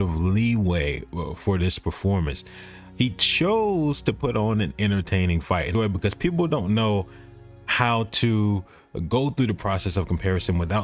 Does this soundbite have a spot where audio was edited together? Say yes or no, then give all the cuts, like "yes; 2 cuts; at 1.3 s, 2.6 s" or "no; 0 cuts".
yes; 1 cut; at 5.7 s